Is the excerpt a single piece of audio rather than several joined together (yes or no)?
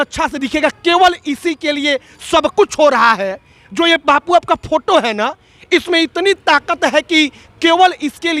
yes